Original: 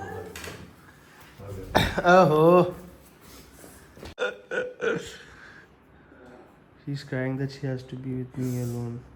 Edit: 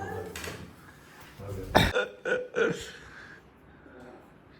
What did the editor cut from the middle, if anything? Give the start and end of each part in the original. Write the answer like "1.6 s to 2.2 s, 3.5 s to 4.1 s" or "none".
1.9 s to 4.2 s